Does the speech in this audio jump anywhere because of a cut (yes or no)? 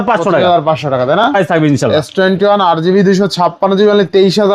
yes